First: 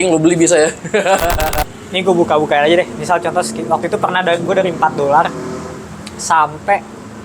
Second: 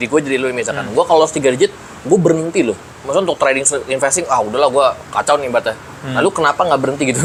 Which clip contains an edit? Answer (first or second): first